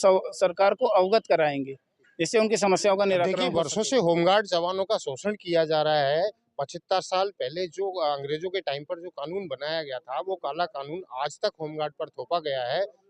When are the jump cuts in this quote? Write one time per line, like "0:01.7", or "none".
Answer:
0:03.5

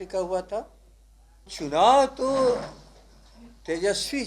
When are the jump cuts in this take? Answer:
0:01.5

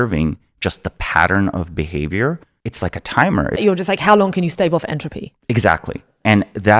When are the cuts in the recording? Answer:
0:02.5
0:03.6

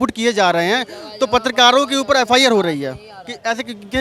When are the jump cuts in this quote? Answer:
none

